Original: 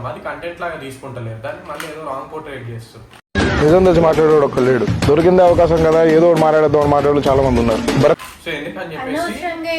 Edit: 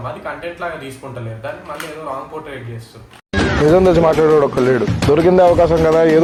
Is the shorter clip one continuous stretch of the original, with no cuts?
yes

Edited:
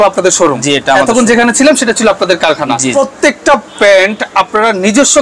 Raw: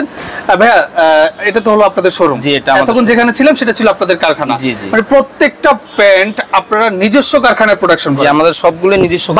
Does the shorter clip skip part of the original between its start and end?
yes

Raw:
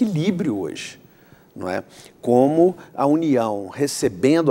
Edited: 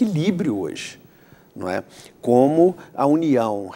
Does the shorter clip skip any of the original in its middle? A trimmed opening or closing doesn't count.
no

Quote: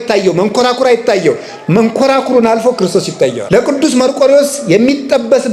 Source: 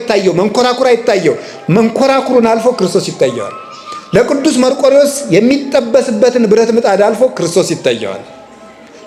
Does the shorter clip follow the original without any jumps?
no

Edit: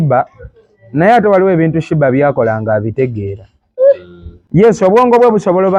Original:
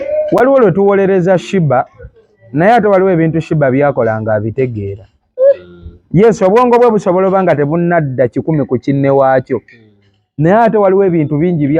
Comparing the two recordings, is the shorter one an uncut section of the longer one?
yes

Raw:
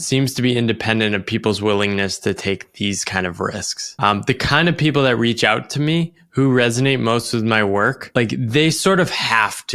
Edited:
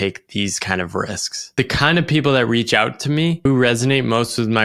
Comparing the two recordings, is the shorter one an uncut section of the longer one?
no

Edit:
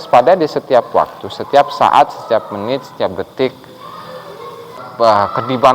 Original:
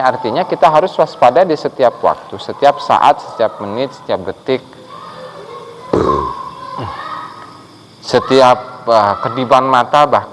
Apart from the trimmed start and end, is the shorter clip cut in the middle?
yes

